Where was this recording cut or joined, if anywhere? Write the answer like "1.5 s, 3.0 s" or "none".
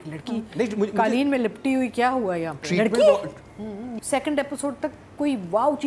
3.9 s